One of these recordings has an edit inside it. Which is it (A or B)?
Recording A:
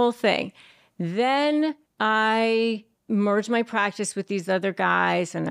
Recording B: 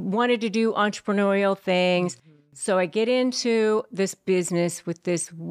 A